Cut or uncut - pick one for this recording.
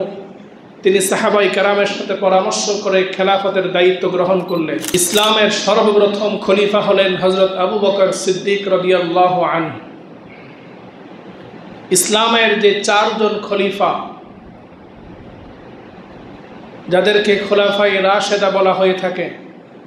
cut